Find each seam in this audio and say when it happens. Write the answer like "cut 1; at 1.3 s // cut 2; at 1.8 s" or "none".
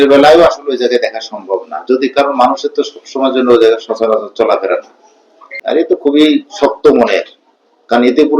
cut 1; at 5.5 s